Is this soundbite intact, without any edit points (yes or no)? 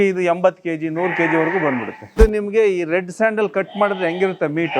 no